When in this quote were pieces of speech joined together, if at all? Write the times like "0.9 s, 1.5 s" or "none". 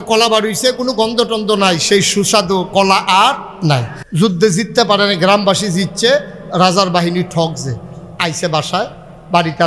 4.0 s